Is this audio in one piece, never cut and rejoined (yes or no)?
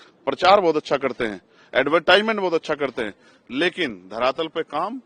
yes